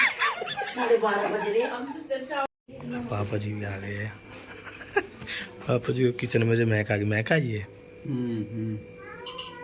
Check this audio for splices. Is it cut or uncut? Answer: cut